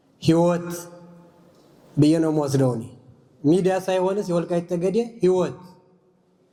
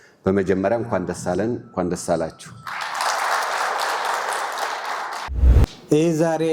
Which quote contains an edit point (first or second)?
second